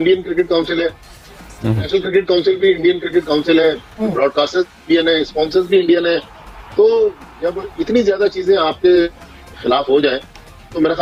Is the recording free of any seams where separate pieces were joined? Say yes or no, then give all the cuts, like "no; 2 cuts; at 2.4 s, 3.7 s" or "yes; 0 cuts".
yes; 0 cuts